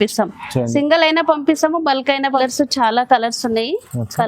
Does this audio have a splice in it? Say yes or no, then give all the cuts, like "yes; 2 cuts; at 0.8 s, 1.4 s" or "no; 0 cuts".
yes; 1 cut; at 2.4 s